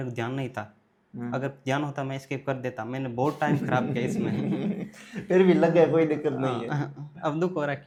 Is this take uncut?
yes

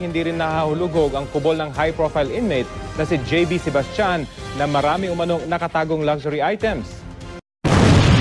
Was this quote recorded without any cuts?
yes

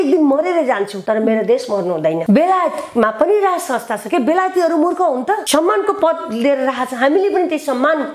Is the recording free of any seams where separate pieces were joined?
no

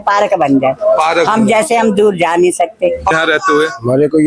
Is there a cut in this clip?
yes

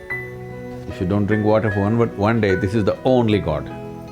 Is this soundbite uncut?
no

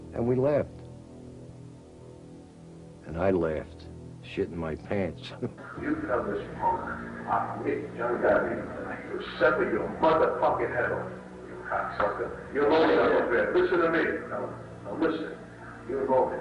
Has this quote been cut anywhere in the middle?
no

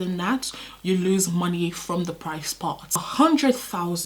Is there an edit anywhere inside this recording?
yes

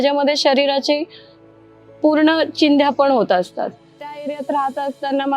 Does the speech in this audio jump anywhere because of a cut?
yes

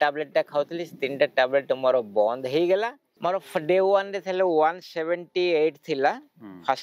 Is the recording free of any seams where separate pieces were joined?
no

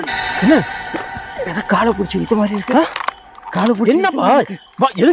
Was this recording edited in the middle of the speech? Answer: no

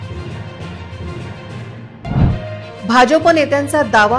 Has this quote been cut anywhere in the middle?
no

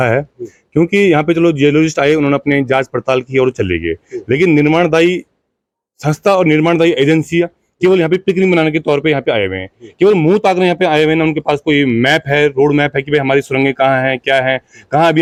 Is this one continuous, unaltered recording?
yes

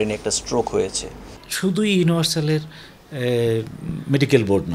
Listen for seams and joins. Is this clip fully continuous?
no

